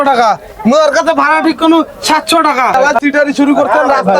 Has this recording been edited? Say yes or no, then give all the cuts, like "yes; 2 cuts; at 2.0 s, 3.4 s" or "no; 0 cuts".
yes; 1 cut; at 2.8 s